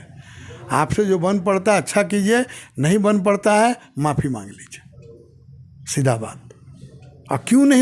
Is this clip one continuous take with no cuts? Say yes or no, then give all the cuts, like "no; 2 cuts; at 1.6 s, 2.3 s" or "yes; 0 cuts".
yes; 0 cuts